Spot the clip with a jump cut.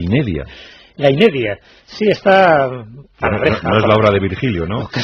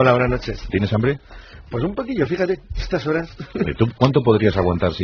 first; 1 cut; at 3.8 s

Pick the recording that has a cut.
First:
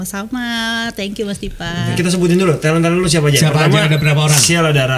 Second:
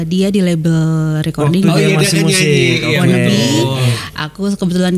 first; 1 cut; at 1.9 s

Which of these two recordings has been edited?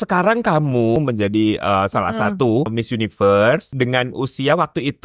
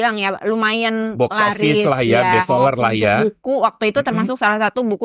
first; 3 cuts; at 1.0 s, 2.7 s, 3.7 s

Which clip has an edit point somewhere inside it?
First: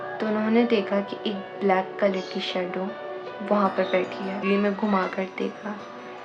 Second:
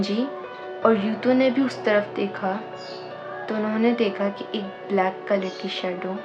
first; 1 cut; at 4.4 s

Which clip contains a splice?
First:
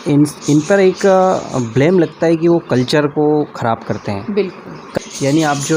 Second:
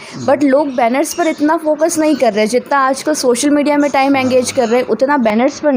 first; 1 cut; at 4.8 s

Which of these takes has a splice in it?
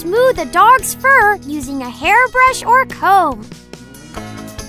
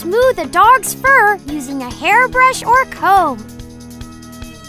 first; 1 cut; at 3.7 s

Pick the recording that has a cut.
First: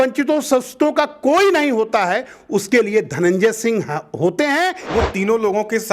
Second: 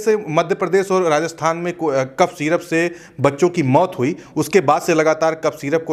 first; 1 cut; at 4.9 s

